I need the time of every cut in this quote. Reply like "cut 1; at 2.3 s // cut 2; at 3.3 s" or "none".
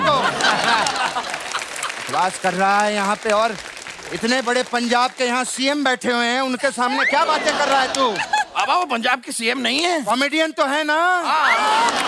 none